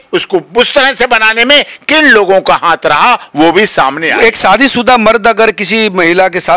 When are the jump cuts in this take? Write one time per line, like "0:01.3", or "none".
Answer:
none